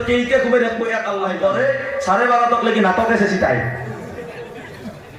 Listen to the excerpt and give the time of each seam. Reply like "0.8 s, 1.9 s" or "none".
1.2 s

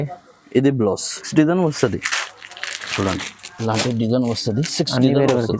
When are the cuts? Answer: 1.3 s

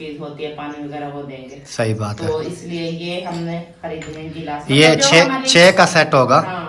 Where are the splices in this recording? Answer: none

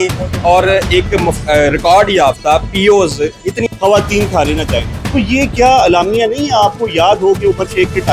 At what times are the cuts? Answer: 3.6 s

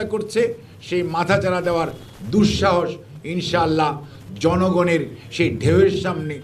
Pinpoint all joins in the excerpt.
none

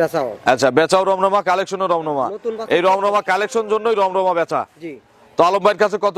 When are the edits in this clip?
none

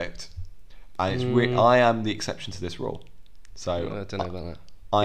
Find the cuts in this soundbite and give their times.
none

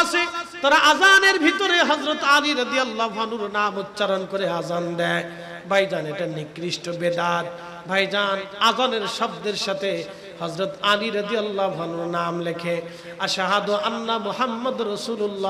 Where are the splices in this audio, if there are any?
none

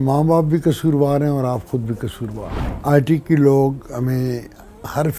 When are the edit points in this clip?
2.6 s

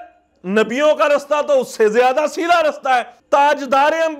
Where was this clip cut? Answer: 3.2 s

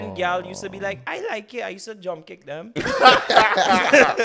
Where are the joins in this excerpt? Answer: none

